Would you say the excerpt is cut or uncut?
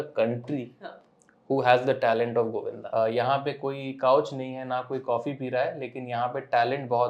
cut